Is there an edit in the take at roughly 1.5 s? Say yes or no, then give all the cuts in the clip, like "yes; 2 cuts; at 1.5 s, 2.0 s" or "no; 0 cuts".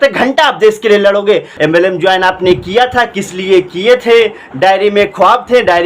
yes; 1 cut; at 1.5 s